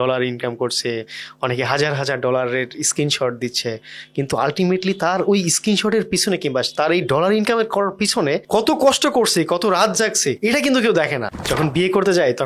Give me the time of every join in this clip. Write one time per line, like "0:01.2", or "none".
0:11.3